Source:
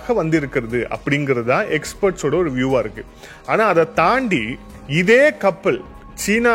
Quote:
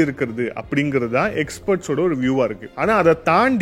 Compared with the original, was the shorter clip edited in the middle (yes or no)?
yes